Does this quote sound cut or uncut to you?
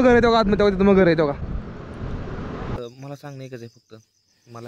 cut